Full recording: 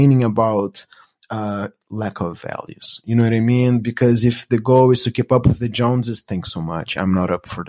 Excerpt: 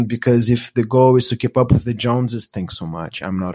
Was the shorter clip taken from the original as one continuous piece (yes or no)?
yes